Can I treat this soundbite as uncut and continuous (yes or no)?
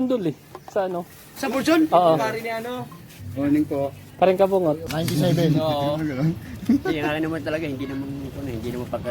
no